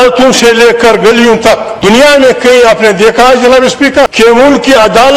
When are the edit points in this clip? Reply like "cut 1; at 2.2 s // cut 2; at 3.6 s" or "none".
cut 1; at 1.7 s // cut 2; at 4.1 s